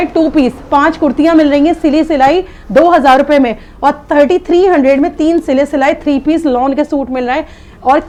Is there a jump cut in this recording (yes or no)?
no